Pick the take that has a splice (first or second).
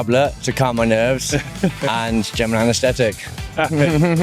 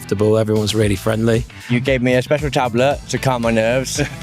second